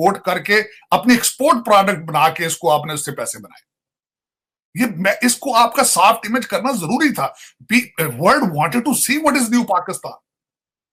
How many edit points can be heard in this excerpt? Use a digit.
0